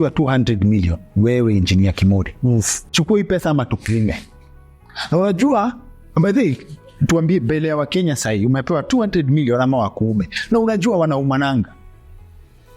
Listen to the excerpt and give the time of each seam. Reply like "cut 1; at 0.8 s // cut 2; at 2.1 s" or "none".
cut 1; at 2.8 s